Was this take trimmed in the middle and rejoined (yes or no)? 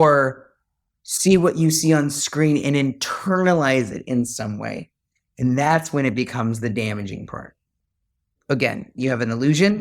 yes